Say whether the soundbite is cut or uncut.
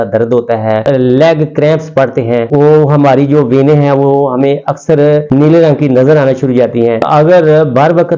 cut